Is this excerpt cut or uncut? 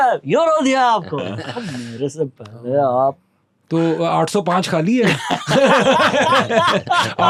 uncut